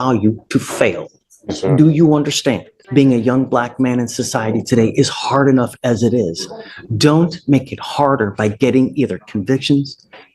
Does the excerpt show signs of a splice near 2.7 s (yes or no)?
yes